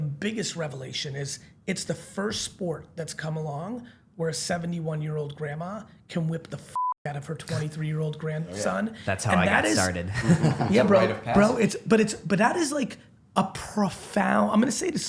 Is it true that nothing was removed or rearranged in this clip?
yes; 0 cuts

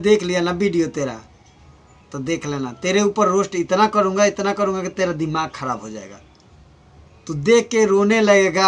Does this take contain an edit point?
no; 0 cuts

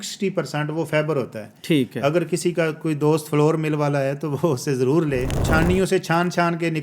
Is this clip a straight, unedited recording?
no; 1 cut; at 5.5 s

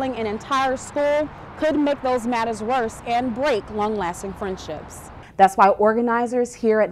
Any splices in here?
yes; 1 cut; at 5.0 s

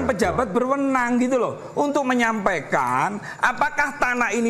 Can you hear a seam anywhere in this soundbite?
no; 0 cuts

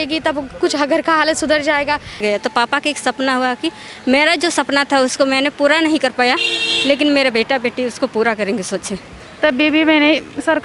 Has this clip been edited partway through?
yes; 2 cuts; at 2.1 s, 9.2 s

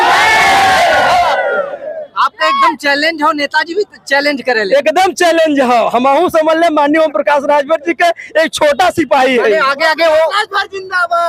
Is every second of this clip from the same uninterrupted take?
yes; 0 cuts

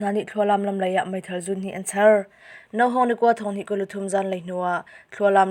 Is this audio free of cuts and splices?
yes; 0 cuts

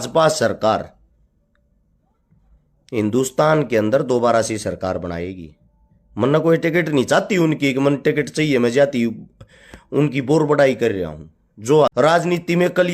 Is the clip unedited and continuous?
no; 1 cut; at 11.9 s

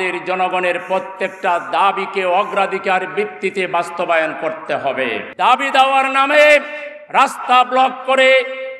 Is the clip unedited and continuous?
no; 1 cut; at 5.2 s

